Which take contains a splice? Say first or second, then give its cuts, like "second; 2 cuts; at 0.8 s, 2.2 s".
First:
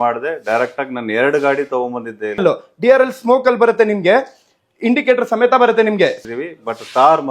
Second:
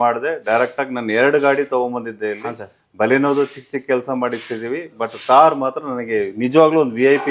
first; 2 cuts; at 2.4 s, 6.2 s